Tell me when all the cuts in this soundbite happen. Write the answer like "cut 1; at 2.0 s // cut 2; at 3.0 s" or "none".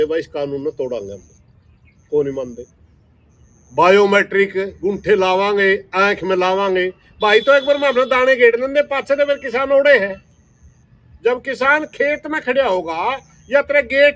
none